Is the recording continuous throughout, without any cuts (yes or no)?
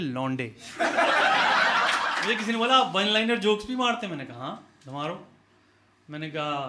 no